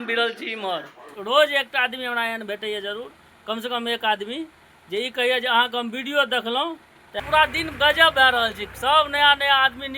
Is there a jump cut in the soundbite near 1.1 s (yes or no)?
yes